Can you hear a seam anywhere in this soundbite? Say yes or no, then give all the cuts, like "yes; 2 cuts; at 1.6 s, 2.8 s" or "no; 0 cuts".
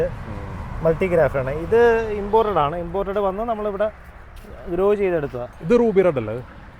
yes; 1 cut; at 5.5 s